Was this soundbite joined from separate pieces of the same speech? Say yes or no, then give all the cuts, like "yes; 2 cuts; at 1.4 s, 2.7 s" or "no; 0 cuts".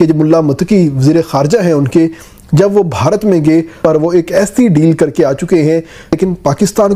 yes; 2 cuts; at 3.8 s, 6.1 s